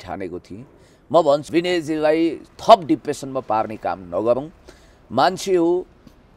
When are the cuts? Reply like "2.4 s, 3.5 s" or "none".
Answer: 1.5 s